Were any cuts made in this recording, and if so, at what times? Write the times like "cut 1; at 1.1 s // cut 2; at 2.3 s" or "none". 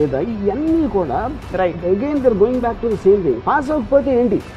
none

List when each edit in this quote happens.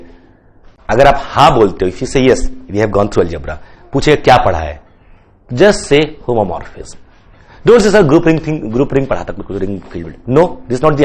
none

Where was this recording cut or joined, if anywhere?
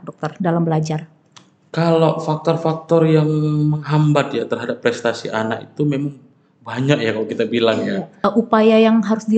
cut 1; at 8.2 s

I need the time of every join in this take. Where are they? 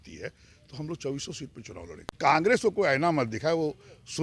cut 1; at 2.2 s

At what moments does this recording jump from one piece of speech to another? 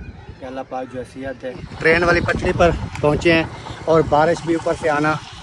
cut 1; at 1.7 s

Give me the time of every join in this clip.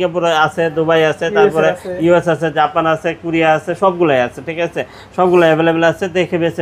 none

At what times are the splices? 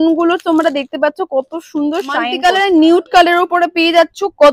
cut 1; at 2.3 s

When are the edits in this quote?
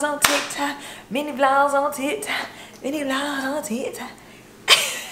none

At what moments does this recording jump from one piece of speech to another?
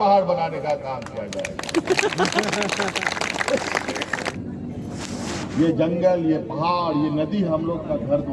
cut 1; at 4.4 s

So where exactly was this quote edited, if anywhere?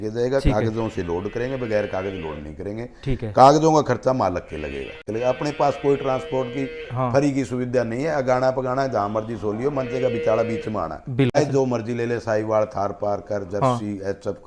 cut 1; at 5.0 s // cut 2; at 11.4 s

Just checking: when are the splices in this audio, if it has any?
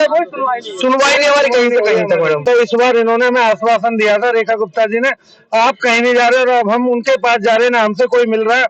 cut 1; at 2.4 s

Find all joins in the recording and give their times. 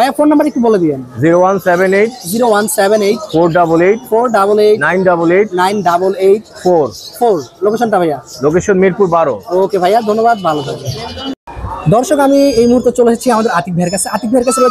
none

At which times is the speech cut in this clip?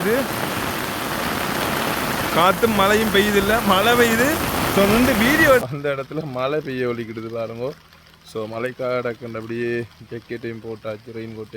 cut 1; at 5.7 s

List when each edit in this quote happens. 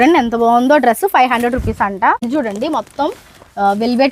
cut 1; at 2.2 s

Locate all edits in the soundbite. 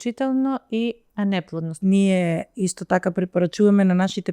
cut 1; at 1.7 s

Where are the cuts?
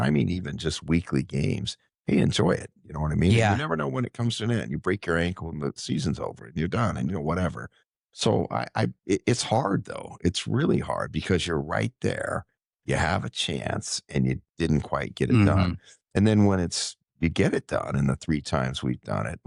none

